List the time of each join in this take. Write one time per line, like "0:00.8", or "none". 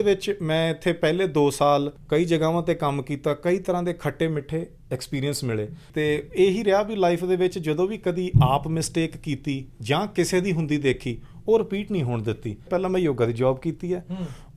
0:02.0
0:05.8
0:12.7